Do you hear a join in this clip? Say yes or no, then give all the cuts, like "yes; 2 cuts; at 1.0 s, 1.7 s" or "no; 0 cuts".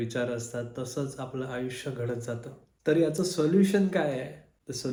no; 0 cuts